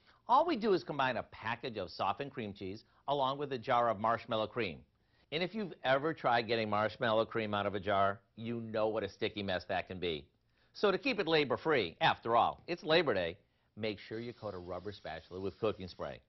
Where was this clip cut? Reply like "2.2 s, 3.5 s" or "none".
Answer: 3.7 s